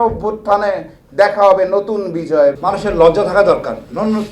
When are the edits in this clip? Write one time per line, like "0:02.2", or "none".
0:02.6